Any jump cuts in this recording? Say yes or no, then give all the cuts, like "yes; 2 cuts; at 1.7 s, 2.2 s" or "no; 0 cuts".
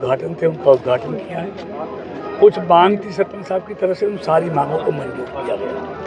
no; 0 cuts